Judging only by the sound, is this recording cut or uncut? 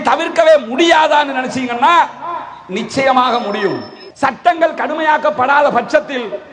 cut